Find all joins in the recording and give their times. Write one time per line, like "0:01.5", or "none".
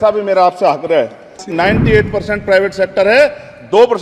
0:01.5